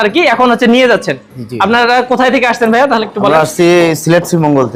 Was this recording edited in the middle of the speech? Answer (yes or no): no